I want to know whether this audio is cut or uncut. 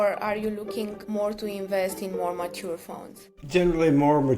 cut